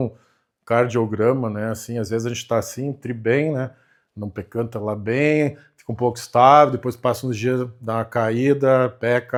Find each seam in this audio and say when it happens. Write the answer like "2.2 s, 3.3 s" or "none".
none